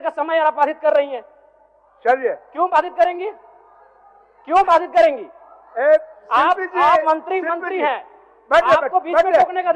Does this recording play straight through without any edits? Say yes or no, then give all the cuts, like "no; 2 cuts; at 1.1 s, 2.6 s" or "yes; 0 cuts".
yes; 0 cuts